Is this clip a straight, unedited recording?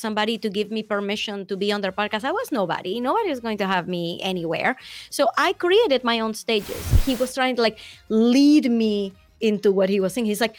no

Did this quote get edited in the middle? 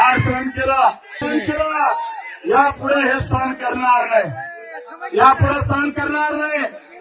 no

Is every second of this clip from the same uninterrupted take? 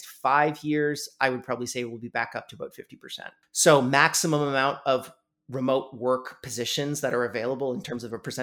no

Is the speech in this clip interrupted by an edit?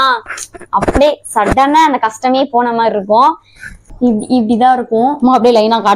yes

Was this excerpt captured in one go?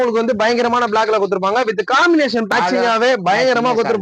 no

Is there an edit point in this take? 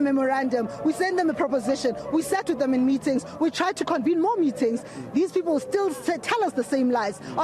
no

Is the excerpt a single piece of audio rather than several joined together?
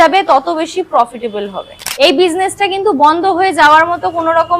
no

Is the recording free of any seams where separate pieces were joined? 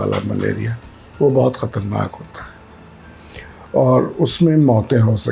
yes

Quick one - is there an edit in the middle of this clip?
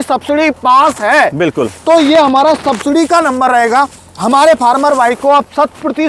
no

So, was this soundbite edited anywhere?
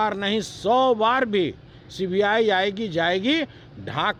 no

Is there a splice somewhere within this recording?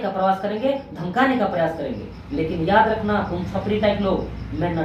no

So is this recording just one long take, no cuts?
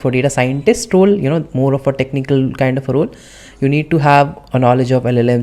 yes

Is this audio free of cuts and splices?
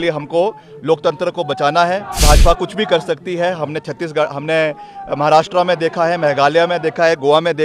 no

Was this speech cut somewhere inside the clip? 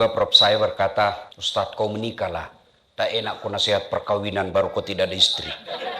yes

